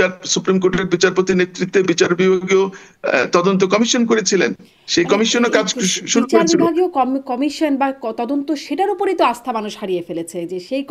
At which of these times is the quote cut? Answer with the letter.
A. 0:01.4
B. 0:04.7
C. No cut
C